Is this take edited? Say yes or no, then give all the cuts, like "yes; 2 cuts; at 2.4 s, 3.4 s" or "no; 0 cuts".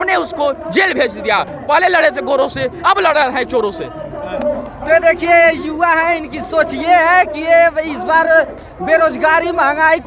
no; 0 cuts